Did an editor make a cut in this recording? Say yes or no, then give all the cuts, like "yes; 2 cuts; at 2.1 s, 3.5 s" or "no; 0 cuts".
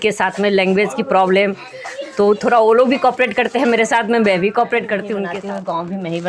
yes; 1 cut; at 5.3 s